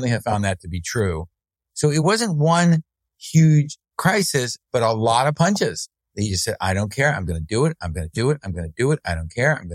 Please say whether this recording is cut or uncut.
uncut